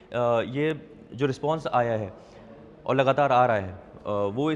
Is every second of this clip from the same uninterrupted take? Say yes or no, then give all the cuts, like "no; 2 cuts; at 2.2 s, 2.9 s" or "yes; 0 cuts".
yes; 0 cuts